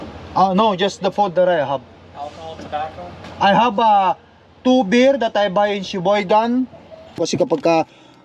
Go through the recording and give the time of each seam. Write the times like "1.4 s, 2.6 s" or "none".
7.2 s